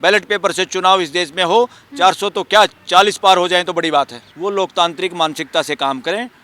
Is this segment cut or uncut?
cut